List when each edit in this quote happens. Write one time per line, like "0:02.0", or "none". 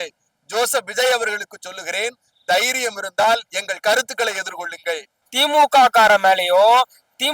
0:05.1